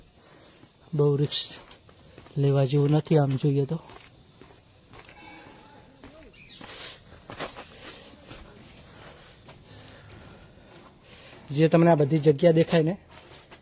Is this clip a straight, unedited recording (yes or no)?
yes